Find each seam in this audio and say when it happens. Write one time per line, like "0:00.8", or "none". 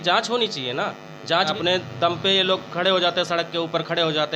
0:01.5